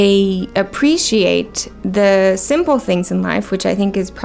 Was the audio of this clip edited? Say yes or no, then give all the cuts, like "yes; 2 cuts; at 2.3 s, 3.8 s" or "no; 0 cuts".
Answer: no; 0 cuts